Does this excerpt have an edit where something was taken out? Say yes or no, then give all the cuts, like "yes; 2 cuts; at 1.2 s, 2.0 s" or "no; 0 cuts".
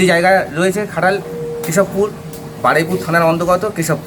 no; 0 cuts